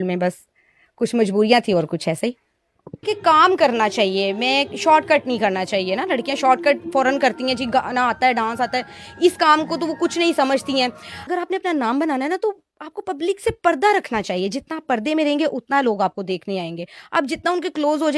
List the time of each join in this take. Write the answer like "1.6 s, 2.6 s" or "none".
3.0 s, 11.2 s